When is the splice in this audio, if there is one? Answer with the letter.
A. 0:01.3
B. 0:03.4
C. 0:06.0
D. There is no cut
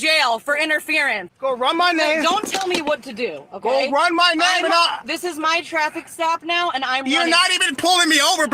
A